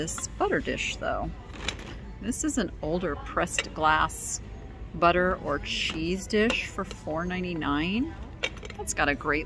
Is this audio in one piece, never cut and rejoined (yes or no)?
yes